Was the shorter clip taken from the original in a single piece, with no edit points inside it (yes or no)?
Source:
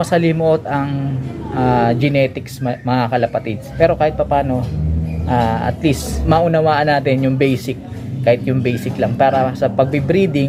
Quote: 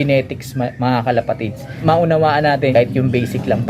no